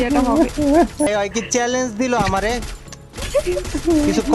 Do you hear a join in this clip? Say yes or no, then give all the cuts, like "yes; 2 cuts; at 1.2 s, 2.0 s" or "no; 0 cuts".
yes; 1 cut; at 1.1 s